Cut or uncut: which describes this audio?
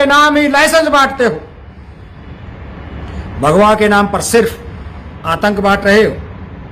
uncut